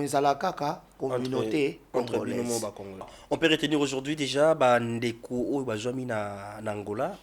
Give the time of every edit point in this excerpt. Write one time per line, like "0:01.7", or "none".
0:03.1